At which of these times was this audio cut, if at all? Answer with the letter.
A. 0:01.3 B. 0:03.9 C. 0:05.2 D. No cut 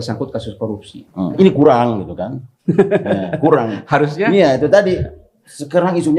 A